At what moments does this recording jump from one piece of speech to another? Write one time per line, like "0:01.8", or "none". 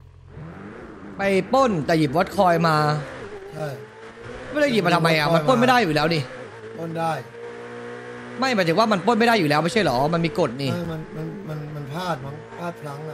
none